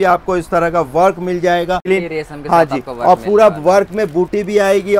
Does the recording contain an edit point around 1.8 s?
yes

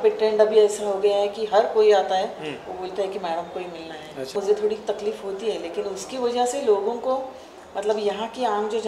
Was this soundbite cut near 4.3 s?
yes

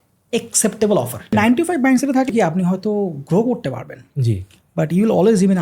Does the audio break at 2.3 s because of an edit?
yes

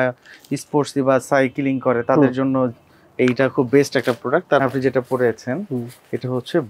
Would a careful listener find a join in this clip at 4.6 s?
yes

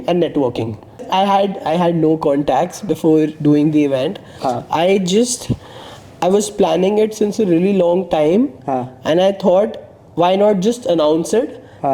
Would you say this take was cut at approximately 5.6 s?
no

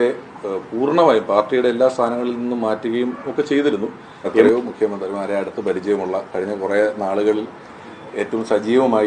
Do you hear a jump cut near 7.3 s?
no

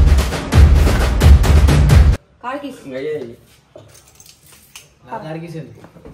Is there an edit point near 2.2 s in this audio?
yes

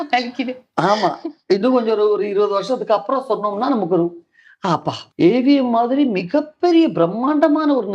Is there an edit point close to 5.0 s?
yes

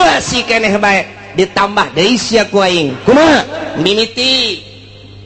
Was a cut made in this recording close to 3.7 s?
yes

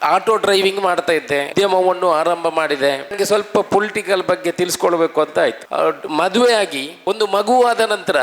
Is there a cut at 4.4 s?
no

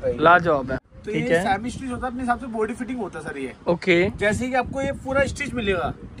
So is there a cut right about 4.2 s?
no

